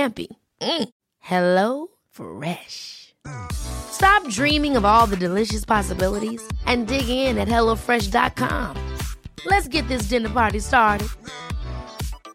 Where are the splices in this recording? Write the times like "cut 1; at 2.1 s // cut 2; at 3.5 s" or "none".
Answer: none